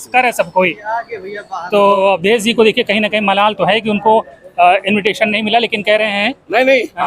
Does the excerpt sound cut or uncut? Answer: cut